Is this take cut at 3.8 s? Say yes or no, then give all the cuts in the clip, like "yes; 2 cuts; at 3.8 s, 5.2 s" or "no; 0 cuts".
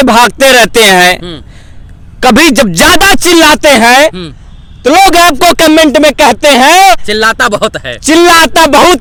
no; 0 cuts